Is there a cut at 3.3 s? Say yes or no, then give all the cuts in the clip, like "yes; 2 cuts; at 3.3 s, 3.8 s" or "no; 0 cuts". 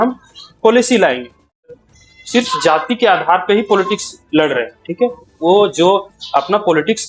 no; 1 cut; at 1.6 s